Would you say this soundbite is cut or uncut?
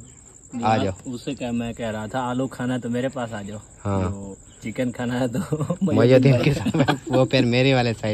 uncut